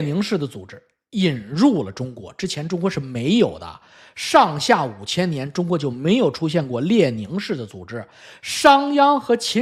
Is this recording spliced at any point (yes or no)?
no